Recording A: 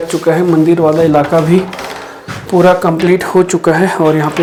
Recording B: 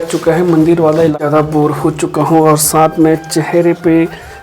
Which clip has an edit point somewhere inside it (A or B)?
B